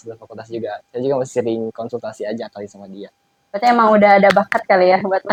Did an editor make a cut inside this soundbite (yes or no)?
no